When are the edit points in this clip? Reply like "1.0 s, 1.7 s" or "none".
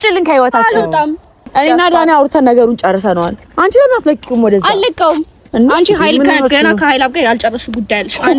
1.5 s